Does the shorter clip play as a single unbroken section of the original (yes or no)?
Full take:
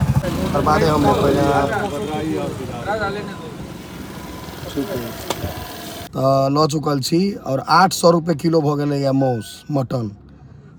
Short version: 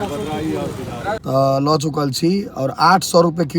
no